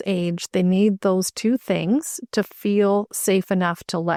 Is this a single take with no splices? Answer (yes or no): yes